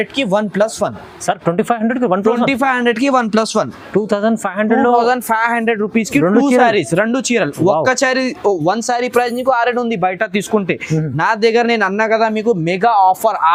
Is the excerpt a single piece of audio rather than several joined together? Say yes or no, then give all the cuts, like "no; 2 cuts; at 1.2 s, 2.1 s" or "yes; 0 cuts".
yes; 0 cuts